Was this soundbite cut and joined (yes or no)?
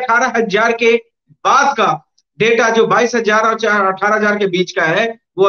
no